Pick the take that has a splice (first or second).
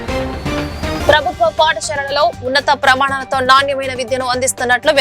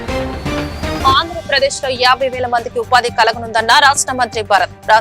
second